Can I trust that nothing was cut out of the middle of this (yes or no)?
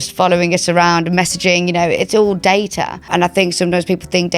no